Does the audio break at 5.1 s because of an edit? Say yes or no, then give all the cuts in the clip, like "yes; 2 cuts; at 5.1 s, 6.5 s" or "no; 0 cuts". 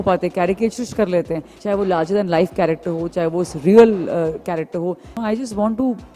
yes; 2 cuts; at 1.5 s, 5.1 s